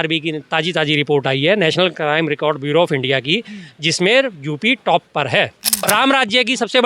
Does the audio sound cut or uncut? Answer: cut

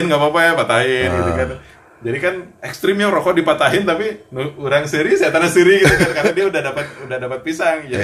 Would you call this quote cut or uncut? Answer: uncut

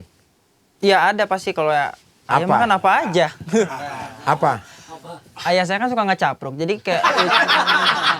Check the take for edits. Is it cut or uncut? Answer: uncut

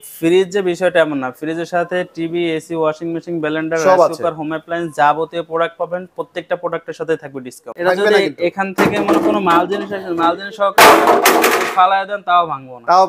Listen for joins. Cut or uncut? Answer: cut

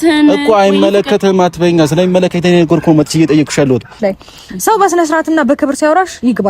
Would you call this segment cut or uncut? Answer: cut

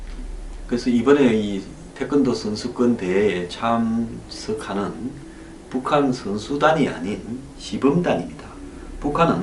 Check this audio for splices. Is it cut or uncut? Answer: uncut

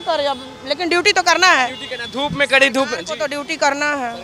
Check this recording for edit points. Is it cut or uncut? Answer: uncut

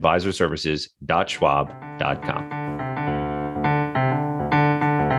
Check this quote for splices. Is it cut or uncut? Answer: cut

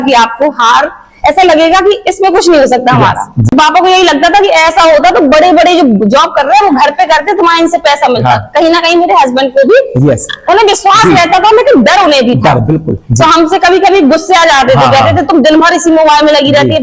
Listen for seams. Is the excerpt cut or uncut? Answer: cut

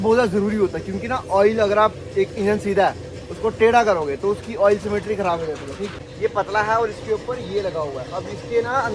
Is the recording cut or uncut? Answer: cut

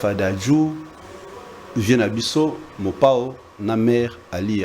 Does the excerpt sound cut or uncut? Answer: uncut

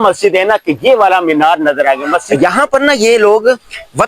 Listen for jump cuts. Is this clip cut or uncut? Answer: cut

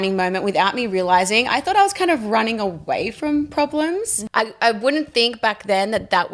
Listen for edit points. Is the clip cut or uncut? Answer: cut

